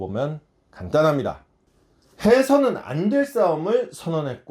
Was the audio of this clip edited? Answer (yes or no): no